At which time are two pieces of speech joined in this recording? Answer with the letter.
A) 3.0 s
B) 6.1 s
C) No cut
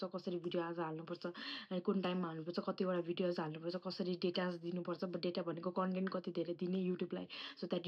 C